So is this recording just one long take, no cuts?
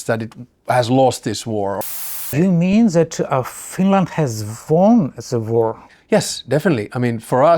no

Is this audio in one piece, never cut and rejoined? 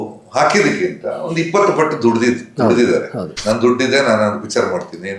no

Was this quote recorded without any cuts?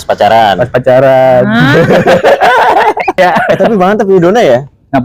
no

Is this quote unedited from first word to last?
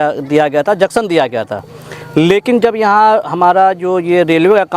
yes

